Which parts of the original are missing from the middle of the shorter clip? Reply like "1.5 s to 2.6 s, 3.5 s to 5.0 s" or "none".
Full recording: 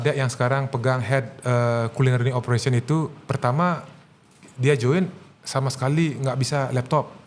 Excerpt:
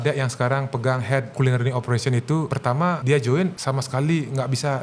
1.3 s to 1.9 s, 3.2 s to 4.2 s, 5.1 s to 5.5 s